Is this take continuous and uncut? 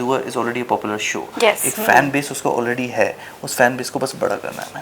yes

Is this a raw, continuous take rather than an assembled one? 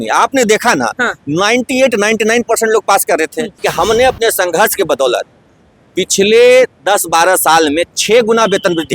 no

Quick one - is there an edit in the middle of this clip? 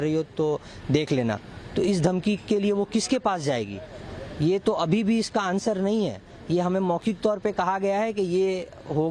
no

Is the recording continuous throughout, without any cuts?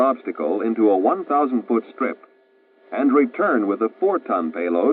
yes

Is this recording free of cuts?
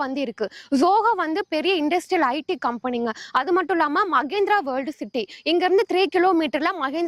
yes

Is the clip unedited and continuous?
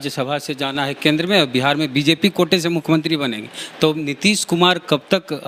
yes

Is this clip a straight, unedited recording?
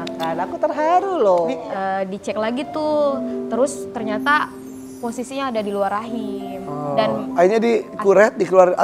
no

